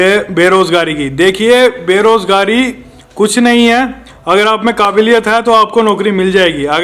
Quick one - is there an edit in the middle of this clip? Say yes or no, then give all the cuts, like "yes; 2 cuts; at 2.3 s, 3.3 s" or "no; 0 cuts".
no; 0 cuts